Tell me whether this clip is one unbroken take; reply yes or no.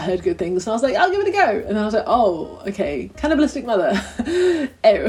yes